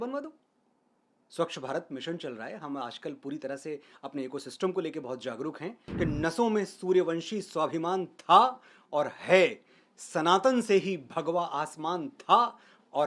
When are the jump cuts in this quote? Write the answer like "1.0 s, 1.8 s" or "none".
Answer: 5.8 s